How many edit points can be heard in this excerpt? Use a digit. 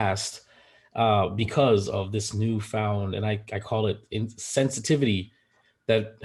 0